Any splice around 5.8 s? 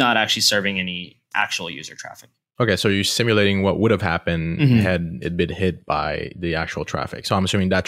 no; 0 cuts

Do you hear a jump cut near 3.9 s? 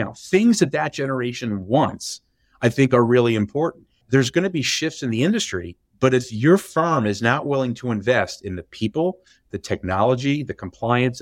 yes; 1 cut; at 3.9 s

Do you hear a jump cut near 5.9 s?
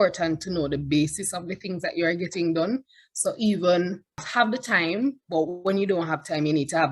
no; 1 cut; at 4.3 s

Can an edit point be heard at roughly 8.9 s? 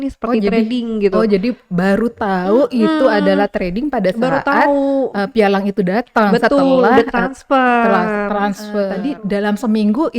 yes; 1 cut; at 8.9 s

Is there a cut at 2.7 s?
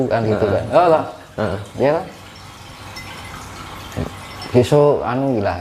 no; 0 cuts

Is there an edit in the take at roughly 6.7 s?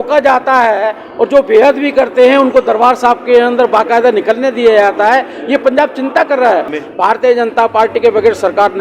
yes; 1 cut; at 6.7 s

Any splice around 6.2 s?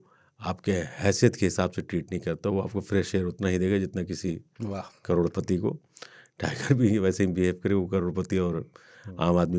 no; 0 cuts

